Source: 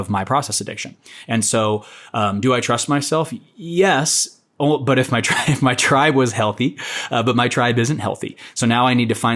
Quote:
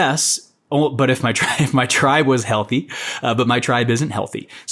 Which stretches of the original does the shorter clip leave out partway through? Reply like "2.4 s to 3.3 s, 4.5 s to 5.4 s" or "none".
none